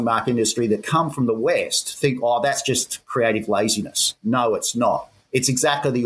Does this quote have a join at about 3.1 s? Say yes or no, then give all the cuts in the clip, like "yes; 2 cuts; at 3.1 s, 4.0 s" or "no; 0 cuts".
no; 1 cut; at 5.2 s